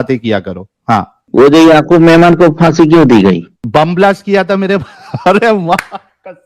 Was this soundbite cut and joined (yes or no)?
yes